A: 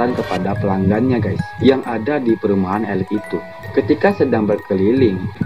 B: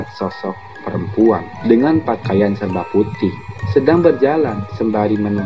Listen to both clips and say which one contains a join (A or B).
B